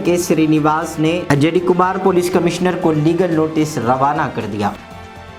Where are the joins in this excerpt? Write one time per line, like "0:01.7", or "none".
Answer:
none